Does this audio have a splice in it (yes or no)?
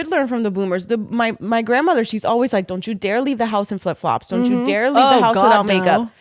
no